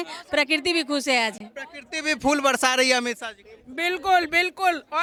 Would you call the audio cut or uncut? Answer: uncut